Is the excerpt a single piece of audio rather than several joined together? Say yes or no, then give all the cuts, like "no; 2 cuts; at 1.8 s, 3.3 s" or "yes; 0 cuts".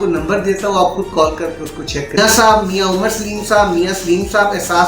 no; 1 cut; at 2.2 s